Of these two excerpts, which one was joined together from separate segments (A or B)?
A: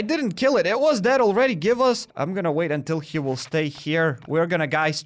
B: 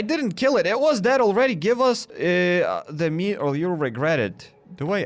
A